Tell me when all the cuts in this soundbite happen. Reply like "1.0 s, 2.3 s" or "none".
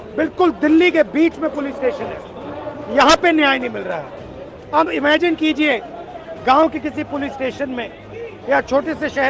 none